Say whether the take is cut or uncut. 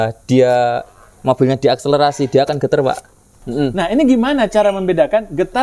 cut